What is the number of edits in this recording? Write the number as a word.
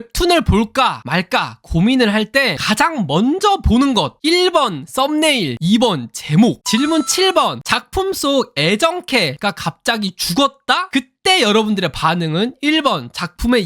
two